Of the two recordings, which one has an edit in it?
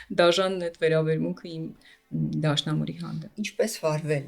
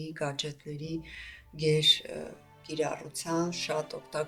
first; 1 cut; at 3.3 s

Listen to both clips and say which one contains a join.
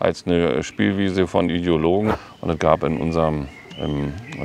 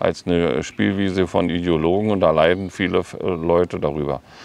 first; 1 cut; at 2.1 s

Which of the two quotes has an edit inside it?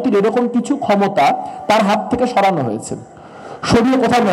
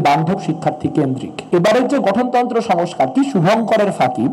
second; 1 cut; at 1.4 s

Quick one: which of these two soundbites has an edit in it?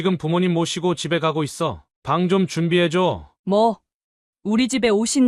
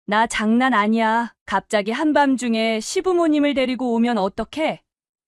first; 1 cut; at 3.3 s

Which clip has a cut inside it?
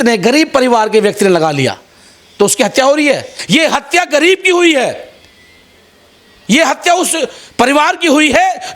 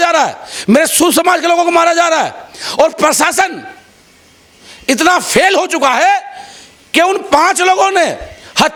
first; 1 cut; at 3.3 s

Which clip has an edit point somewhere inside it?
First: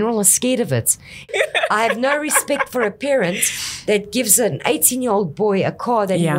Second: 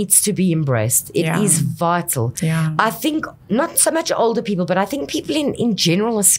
first; 1 cut; at 1.3 s

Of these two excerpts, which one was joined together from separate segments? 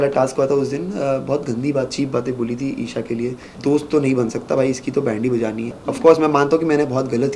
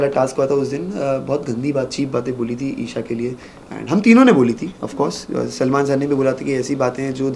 first; 2 cuts; at 3.5 s, 5.7 s

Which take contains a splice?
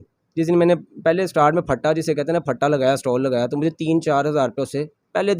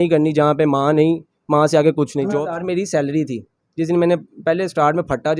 second; 1 cut; at 2.4 s

